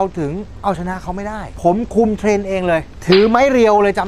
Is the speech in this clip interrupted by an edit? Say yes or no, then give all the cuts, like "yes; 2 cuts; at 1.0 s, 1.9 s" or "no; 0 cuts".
yes; 2 cuts; at 1.5 s, 2.9 s